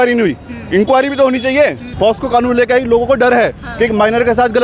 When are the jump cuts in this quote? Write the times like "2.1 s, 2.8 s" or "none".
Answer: 1.9 s